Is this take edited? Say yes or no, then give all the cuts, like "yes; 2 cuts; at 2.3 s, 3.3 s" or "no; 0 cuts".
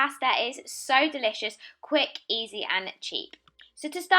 no; 0 cuts